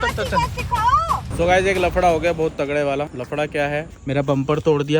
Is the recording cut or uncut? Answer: cut